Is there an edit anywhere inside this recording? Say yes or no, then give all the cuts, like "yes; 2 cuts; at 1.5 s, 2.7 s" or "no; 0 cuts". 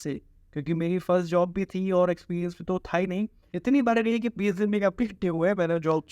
yes; 1 cut; at 3.4 s